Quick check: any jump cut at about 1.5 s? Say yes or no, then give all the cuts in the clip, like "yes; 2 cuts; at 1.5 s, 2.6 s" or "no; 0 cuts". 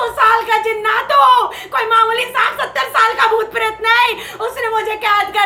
no; 0 cuts